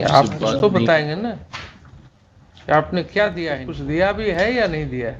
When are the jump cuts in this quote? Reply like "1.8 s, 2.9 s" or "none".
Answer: 3.7 s

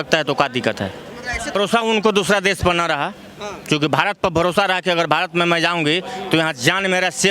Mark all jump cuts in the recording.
1.5 s

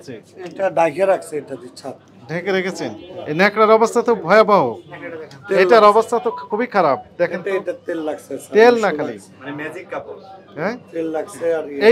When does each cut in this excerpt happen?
none

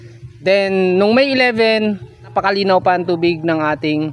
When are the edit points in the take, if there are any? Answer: 2.3 s

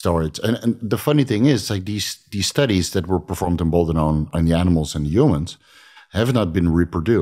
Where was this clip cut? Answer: 4.3 s

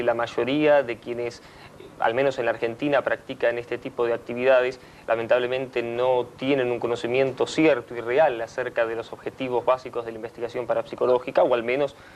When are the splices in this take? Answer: 7.0 s

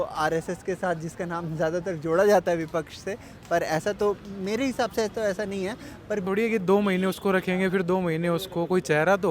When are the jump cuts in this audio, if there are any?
6.2 s

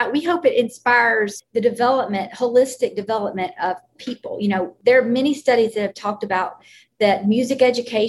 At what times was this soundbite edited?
1.4 s, 4.7 s

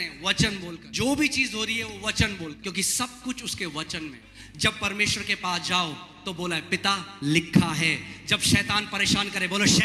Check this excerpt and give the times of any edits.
0.8 s, 2.6 s, 4.3 s

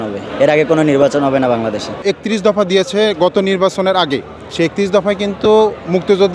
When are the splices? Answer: 2.0 s

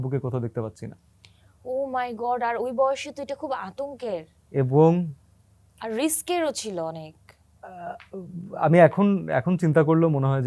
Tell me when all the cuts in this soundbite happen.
none

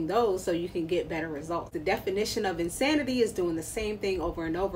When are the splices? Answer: 1.7 s

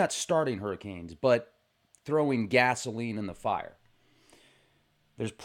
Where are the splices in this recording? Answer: 2.6 s

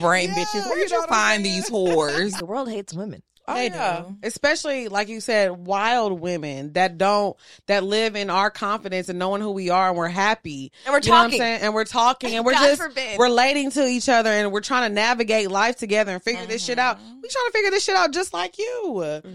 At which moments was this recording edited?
2.3 s

